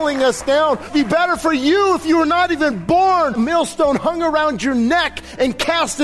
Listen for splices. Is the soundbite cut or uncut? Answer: cut